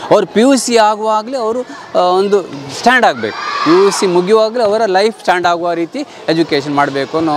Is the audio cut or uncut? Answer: uncut